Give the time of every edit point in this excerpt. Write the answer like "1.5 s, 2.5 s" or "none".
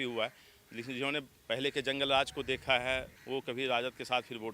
3.2 s